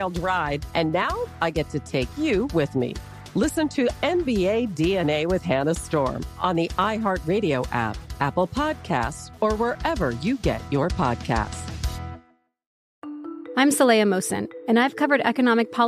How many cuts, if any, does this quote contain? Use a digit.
1